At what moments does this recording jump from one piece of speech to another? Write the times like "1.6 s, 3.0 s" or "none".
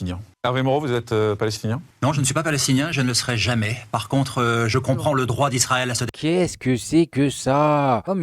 6.1 s